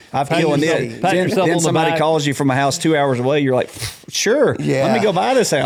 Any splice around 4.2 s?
no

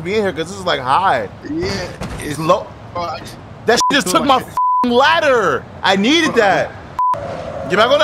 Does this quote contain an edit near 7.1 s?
yes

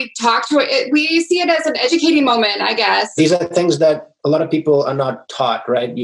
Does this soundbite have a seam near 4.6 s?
no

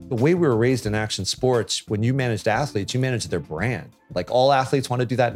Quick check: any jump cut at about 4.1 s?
yes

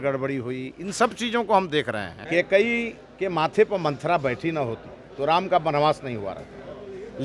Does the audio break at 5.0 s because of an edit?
no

